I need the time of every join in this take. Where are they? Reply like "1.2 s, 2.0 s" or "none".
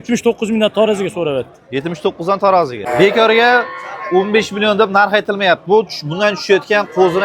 2.8 s

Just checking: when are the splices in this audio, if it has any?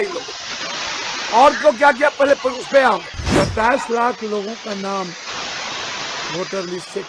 3.2 s

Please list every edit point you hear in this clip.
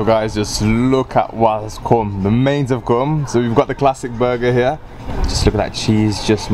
none

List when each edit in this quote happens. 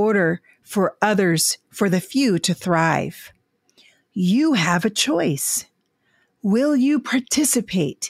none

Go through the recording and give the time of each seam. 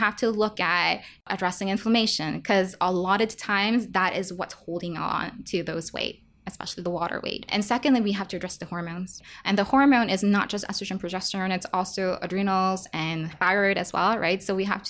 1.2 s, 7.5 s, 9.2 s, 13.4 s

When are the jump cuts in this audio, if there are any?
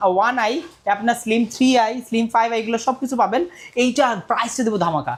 none

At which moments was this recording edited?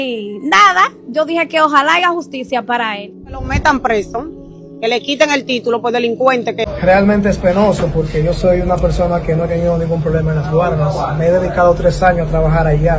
6.7 s

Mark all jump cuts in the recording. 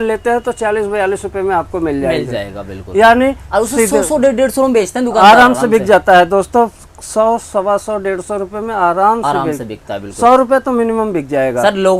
none

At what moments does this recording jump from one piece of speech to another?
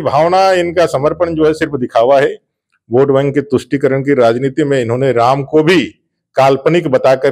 none

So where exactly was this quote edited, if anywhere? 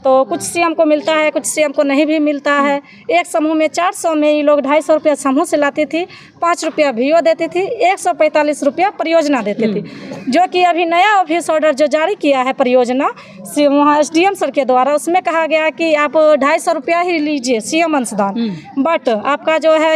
none

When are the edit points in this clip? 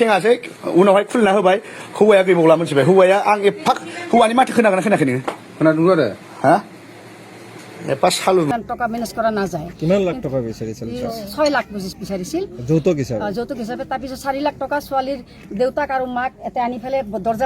8.5 s

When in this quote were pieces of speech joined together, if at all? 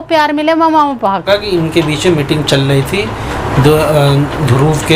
1.2 s

